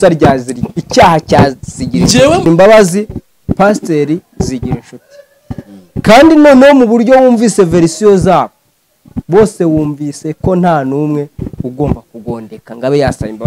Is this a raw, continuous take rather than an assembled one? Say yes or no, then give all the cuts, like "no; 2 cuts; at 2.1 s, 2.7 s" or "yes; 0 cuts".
no; 1 cut; at 2.5 s